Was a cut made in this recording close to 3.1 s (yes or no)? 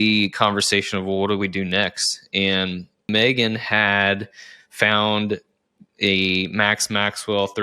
yes